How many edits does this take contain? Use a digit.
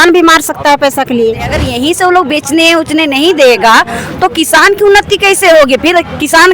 1